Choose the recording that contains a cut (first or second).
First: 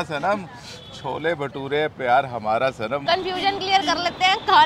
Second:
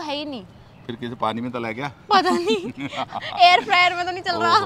first